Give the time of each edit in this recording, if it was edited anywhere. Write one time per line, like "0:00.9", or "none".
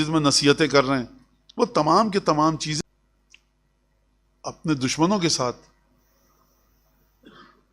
0:02.8